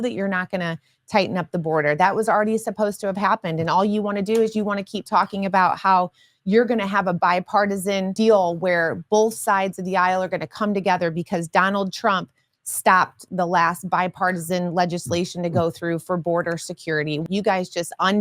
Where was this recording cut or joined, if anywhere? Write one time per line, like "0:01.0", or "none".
0:08.1
0:17.2